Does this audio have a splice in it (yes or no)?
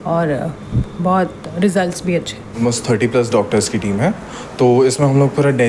yes